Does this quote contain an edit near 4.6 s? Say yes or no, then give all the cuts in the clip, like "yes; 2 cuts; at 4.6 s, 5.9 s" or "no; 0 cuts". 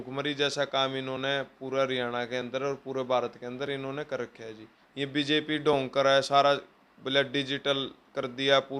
yes; 1 cut; at 4.6 s